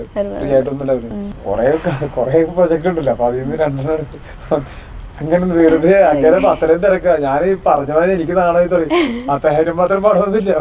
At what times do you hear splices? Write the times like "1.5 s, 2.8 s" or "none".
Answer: 1.3 s